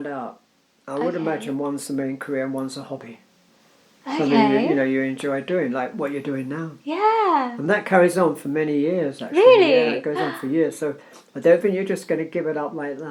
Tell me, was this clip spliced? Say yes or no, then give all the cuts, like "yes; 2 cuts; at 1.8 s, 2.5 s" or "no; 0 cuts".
no; 0 cuts